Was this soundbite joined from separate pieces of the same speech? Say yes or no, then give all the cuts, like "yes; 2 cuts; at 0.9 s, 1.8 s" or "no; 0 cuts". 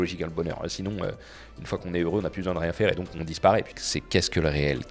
yes; 2 cuts; at 3.2 s, 3.8 s